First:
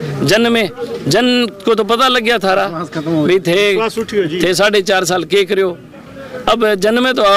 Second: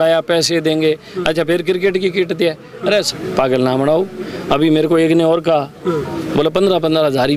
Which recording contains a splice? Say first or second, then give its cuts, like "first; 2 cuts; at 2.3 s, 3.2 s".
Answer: second; 1 cut; at 3.1 s